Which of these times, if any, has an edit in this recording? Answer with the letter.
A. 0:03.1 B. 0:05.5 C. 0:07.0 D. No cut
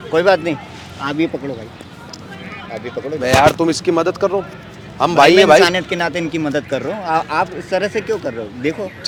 D